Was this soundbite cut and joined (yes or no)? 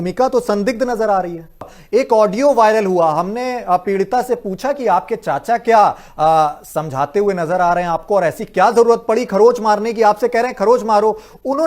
yes